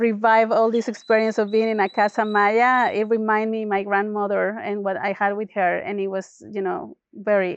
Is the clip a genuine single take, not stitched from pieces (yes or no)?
yes